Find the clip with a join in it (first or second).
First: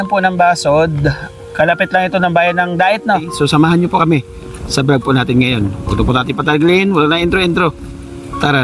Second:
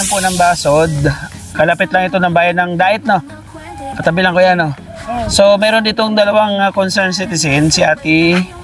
first